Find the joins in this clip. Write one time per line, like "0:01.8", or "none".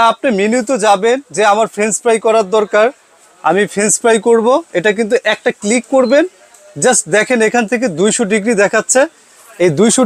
none